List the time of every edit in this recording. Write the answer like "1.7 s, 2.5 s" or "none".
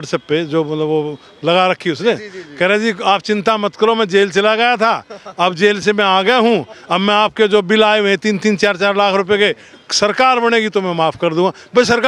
none